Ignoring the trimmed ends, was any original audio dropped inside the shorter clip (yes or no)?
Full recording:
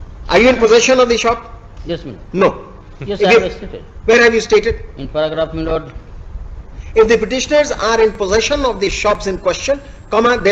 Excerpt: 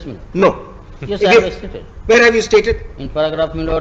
no